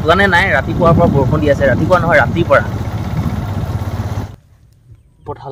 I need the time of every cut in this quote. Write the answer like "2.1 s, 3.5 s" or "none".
4.3 s